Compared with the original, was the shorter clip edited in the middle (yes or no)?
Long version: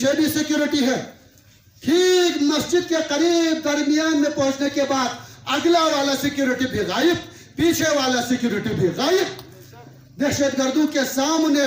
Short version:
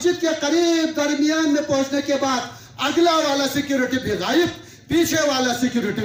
no